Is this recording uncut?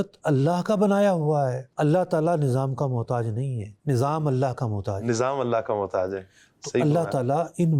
no; 1 cut; at 1.7 s

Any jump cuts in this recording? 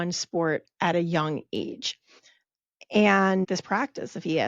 yes; 1 cut; at 3.5 s

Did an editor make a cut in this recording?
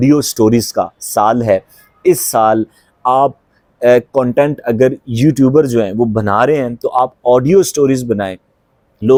no; 0 cuts

